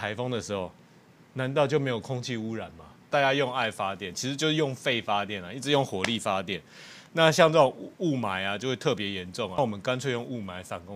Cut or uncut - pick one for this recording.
cut